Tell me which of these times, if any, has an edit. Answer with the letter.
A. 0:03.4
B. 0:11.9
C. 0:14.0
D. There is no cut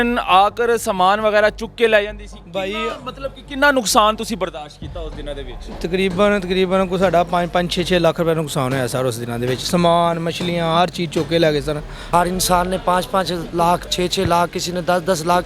B